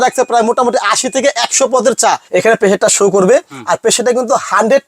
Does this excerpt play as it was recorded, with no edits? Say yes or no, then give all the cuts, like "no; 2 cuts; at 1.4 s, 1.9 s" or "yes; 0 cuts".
no; 1 cut; at 2.2 s